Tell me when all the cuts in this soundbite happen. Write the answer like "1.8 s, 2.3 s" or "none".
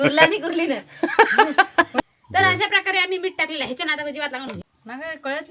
2.0 s